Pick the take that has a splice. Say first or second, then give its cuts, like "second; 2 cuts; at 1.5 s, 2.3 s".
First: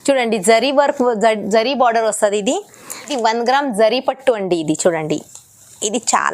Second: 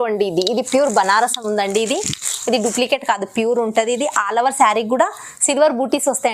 first; 1 cut; at 3.1 s